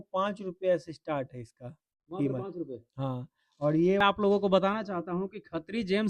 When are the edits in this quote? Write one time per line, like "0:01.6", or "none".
0:04.0